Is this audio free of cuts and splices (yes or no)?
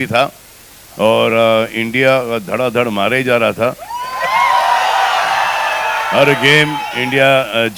yes